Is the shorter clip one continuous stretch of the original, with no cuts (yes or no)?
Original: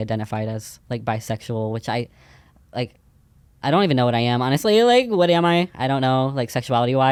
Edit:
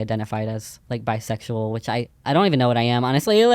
no